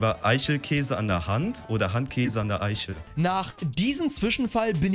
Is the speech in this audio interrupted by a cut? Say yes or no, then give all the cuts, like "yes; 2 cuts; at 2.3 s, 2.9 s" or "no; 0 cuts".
yes; 1 cut; at 3.1 s